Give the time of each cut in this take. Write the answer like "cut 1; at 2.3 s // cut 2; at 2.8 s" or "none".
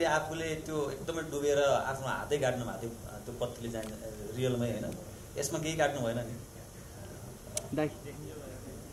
none